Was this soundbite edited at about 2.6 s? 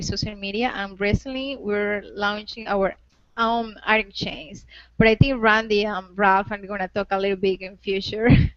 yes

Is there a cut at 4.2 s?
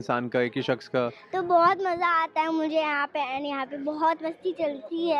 no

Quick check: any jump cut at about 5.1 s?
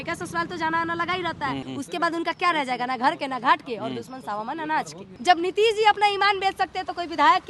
yes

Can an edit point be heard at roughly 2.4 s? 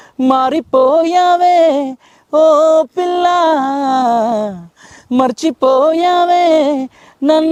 no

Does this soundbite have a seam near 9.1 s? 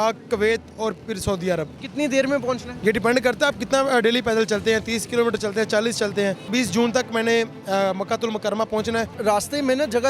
yes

